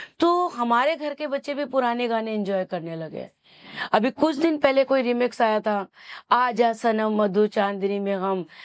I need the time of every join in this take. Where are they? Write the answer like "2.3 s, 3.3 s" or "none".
none